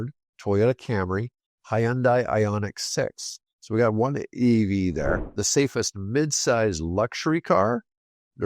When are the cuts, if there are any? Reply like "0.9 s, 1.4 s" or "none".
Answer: 5.2 s